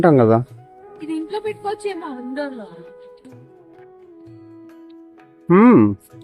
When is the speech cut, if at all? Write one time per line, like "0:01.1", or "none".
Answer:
0:02.6
0:05.5